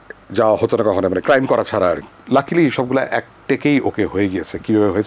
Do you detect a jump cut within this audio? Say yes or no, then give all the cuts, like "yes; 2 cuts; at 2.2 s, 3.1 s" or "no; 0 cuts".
yes; 1 cut; at 2.1 s